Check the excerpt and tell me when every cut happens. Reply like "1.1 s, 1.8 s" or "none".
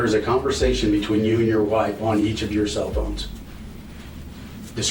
none